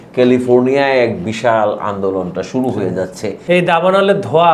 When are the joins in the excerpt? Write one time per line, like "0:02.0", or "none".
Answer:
0:03.3